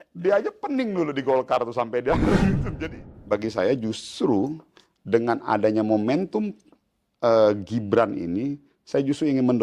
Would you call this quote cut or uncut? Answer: cut